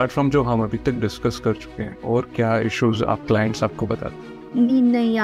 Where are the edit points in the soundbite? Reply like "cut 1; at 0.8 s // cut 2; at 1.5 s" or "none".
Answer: cut 1; at 3.2 s // cut 2; at 4.3 s